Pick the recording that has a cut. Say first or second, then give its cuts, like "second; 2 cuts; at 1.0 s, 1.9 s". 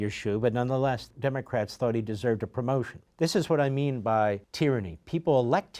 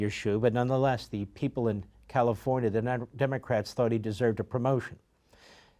first; 3 cuts; at 1.1 s, 3.0 s, 4.5 s